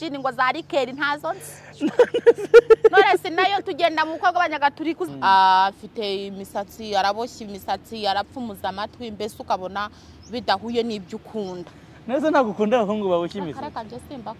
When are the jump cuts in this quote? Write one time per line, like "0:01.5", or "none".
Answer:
0:05.0